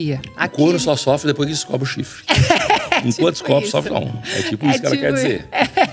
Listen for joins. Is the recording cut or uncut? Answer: uncut